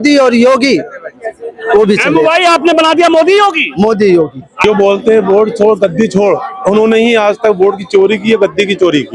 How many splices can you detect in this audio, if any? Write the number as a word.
one